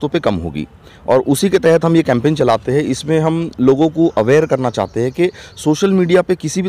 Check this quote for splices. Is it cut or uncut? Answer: uncut